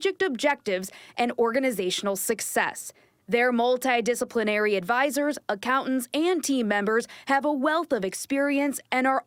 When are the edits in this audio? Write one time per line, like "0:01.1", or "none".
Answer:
none